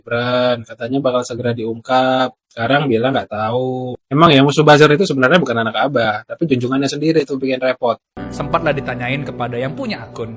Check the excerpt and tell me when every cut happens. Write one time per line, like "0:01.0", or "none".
0:08.1